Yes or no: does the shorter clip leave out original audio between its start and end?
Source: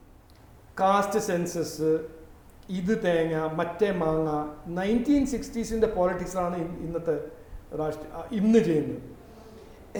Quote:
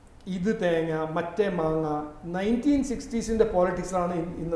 no